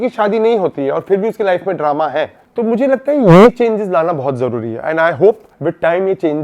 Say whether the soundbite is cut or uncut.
uncut